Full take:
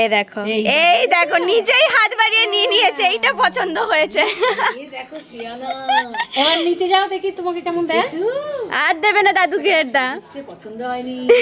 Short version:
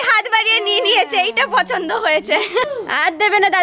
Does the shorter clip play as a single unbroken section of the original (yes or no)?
no